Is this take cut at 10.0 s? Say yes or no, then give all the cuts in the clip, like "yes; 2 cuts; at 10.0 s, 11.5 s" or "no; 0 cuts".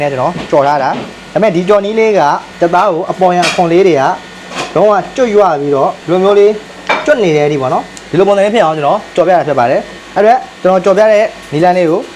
yes; 1 cut; at 10.0 s